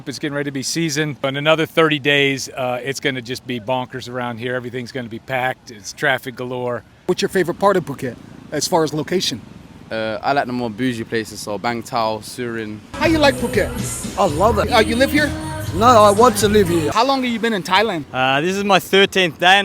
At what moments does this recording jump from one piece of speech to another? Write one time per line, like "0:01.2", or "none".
0:01.2
0:07.0
0:12.8
0:16.9